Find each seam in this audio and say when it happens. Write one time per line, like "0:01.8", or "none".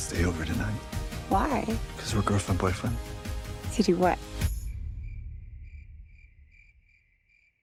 none